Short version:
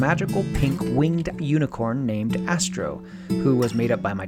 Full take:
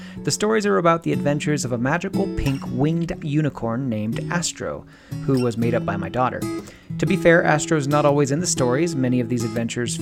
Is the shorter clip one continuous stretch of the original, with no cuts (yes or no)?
yes